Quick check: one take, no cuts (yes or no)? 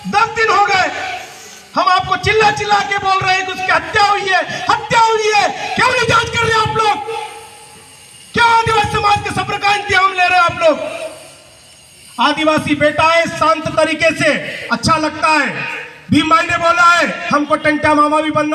yes